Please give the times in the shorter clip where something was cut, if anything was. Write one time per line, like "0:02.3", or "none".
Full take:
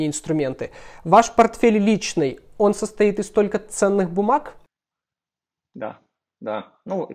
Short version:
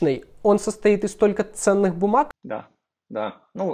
0:02.4